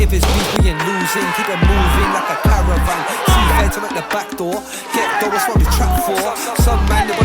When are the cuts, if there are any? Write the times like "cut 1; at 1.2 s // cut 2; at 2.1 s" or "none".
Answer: none

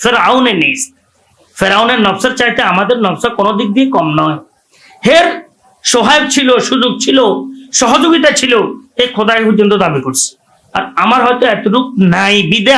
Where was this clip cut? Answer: none

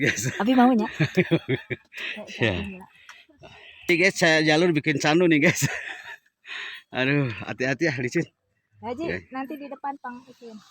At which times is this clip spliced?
cut 1; at 3.9 s

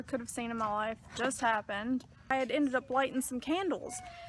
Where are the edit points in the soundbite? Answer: cut 1; at 2.3 s

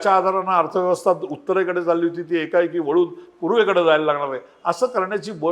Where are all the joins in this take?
none

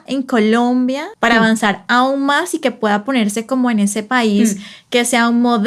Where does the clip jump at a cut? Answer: cut 1; at 1.1 s

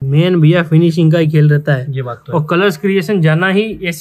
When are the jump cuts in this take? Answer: none

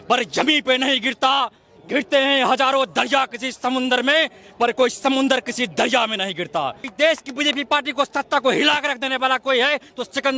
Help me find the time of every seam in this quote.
cut 1; at 6.9 s

